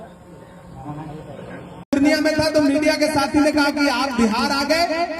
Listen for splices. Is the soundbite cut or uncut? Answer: cut